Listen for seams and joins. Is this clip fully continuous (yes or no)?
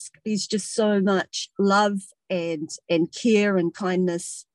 no